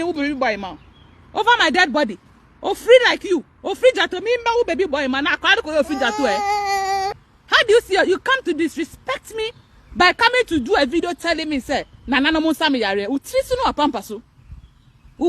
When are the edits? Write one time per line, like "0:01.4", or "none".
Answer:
0:07.2